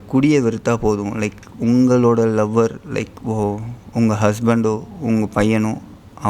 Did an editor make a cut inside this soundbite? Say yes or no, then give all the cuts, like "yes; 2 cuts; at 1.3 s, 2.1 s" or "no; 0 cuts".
no; 0 cuts